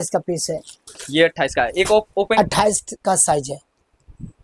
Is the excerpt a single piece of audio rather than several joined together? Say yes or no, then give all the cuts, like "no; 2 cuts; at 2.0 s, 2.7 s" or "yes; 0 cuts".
no; 1 cut; at 2.4 s